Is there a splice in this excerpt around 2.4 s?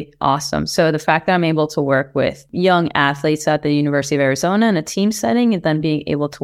yes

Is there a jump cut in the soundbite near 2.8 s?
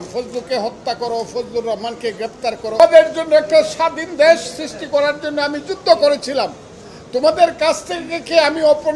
yes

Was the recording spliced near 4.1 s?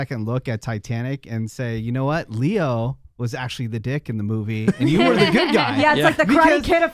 no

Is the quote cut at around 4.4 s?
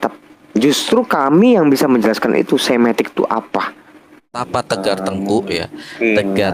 yes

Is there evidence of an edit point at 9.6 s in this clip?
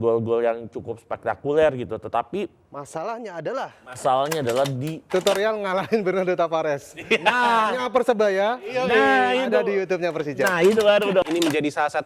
no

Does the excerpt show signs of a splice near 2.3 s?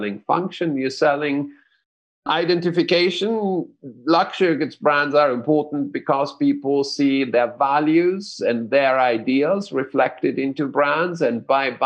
yes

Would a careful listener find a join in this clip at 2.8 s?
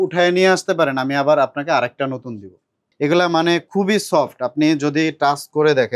yes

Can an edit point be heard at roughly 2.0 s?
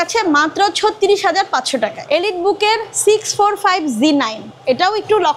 yes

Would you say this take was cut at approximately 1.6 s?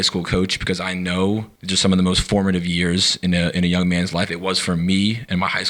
yes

